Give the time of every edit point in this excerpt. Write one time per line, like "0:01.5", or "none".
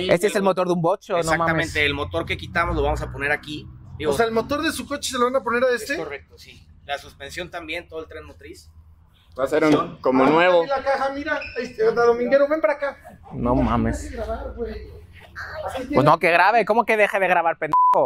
none